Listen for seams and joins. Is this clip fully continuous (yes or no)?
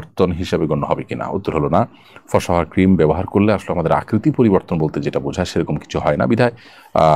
yes